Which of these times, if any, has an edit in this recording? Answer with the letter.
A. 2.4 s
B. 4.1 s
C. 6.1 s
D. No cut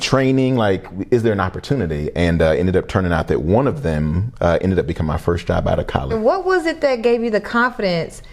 C